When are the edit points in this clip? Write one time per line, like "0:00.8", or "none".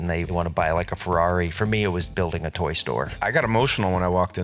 0:03.1